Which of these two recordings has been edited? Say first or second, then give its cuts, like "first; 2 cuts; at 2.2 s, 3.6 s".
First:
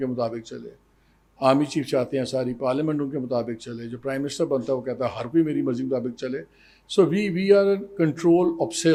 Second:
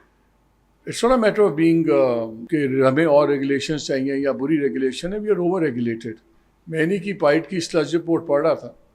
second; 1 cut; at 2.4 s